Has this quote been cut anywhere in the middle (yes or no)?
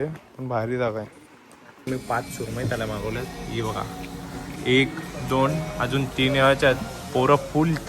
yes